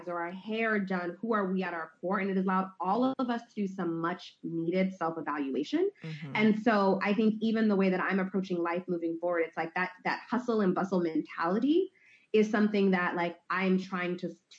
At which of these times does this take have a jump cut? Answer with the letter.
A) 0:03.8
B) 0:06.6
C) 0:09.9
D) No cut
D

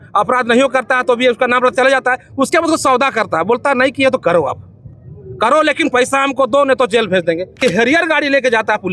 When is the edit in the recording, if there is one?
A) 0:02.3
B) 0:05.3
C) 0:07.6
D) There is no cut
C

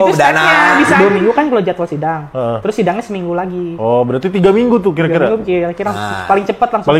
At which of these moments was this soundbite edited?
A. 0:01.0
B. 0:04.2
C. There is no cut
A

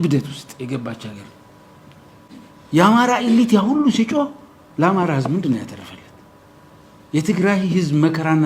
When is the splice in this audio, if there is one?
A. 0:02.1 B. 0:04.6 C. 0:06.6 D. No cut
A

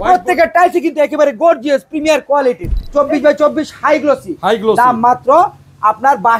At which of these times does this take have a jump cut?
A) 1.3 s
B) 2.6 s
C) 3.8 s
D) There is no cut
B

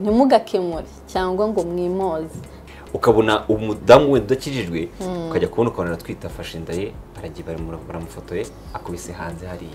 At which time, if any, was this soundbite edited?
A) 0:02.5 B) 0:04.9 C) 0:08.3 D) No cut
A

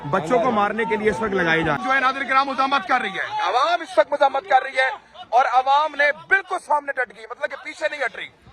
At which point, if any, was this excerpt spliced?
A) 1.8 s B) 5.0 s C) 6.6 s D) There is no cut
A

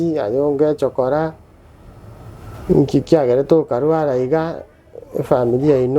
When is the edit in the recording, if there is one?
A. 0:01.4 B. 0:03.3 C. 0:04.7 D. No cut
D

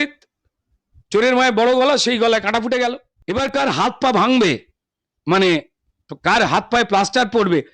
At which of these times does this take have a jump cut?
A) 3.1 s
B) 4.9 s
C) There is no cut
A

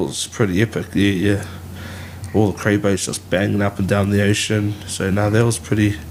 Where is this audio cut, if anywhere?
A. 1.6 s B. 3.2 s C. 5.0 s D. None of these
D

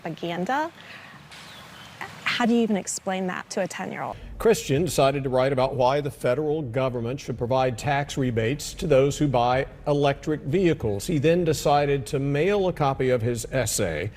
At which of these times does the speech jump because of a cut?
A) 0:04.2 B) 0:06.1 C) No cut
A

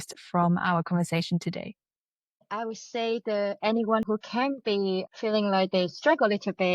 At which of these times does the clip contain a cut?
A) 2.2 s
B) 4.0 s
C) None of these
B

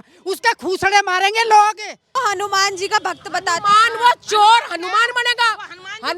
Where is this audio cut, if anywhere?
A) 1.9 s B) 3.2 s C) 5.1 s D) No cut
A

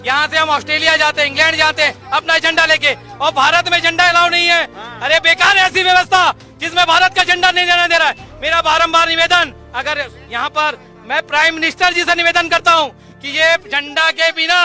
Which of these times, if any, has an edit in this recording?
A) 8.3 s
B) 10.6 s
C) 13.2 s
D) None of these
D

